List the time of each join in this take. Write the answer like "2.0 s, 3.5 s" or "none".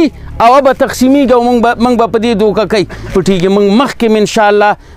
3.1 s